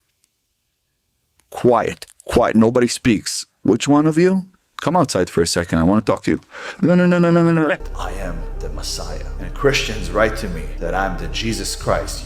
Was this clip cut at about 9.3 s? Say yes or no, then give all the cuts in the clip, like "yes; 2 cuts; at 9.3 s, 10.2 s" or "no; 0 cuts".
no; 1 cut; at 7.8 s